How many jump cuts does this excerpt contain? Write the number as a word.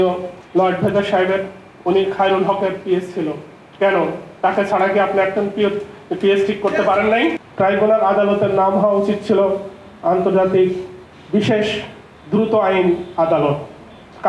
one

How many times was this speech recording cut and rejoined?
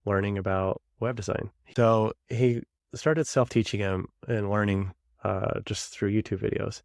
one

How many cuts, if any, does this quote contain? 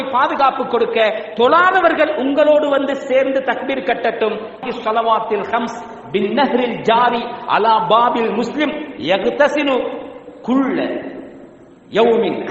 one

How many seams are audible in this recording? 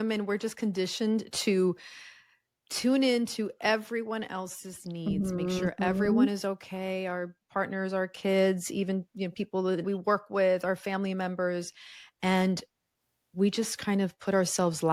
zero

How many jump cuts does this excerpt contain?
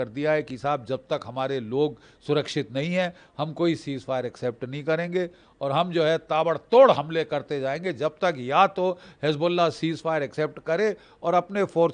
zero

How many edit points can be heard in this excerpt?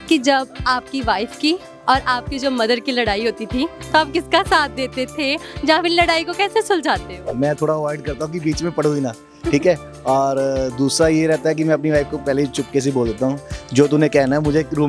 zero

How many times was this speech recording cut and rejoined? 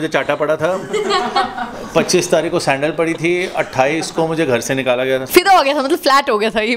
one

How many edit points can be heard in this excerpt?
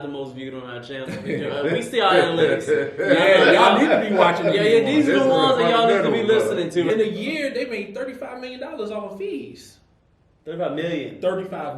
one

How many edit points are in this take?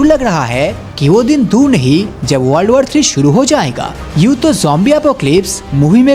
zero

